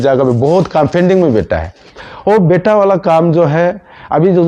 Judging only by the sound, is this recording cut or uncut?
uncut